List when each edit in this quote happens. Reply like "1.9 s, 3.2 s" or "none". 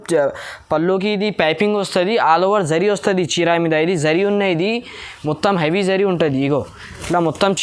none